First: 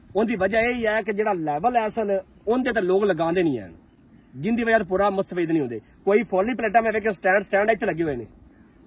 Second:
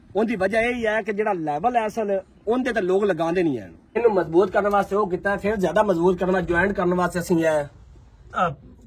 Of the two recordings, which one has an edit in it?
second; 1 cut; at 4.0 s

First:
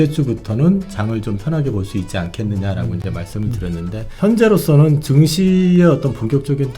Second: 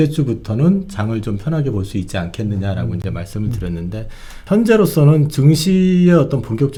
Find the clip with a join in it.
first; 1 cut; at 4.1 s

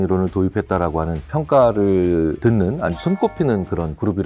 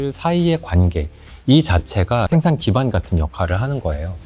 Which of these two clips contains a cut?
second; 1 cut; at 2.3 s

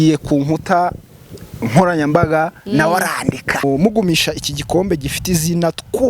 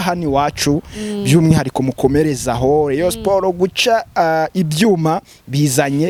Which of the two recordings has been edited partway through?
first; 1 cut; at 3.6 s

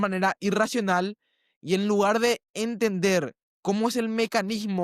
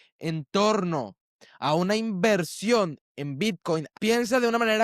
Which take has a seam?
second; 1 cut; at 3.9 s

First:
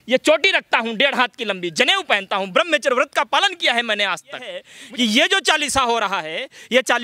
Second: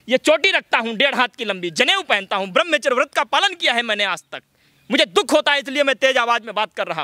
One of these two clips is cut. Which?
first; 1 cut; at 4.7 s

